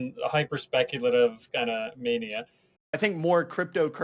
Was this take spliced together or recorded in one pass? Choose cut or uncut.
cut